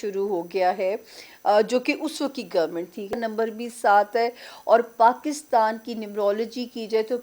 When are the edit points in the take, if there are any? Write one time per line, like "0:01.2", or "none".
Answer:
0:03.1